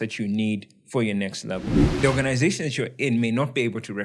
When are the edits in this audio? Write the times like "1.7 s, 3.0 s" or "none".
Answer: 1.9 s